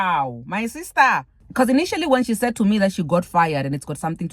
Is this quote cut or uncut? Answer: cut